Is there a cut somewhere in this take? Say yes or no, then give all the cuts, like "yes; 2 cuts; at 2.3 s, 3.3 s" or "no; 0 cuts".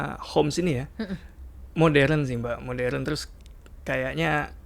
no; 0 cuts